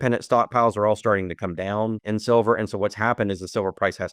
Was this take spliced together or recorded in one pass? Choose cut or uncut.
cut